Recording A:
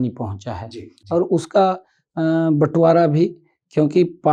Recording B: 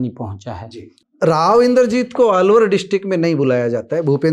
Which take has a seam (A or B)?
B